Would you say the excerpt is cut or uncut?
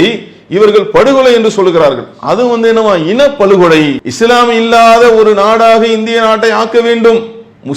cut